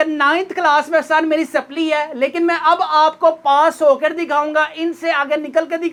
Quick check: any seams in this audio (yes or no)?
no